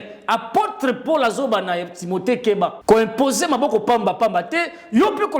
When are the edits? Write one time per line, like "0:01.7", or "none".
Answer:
0:02.8